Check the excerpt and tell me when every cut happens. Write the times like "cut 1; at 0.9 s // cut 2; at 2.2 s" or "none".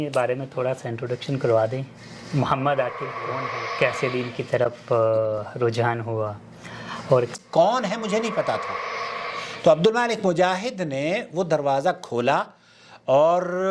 cut 1; at 3.3 s // cut 2; at 7.4 s